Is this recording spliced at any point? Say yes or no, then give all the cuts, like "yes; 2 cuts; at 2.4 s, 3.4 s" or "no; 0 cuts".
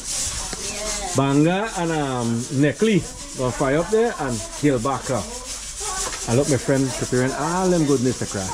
no; 0 cuts